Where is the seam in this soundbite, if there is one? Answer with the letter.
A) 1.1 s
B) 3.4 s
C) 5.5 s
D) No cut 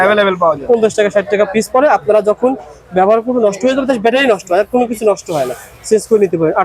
D